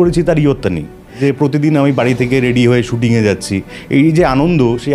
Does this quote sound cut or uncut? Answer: cut